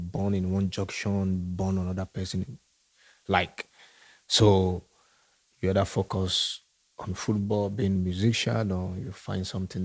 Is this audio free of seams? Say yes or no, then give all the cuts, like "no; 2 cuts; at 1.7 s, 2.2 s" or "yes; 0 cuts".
yes; 0 cuts